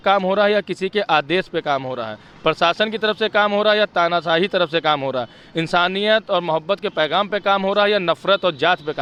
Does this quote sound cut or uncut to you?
uncut